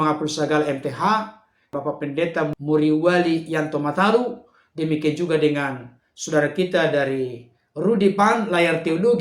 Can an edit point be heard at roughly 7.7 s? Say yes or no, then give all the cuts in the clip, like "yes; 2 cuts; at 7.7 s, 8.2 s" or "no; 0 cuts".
no; 1 cut; at 1.7 s